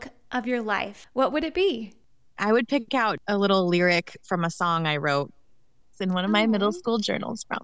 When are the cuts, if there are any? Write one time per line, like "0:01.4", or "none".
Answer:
0:01.0
0:02.0
0:03.2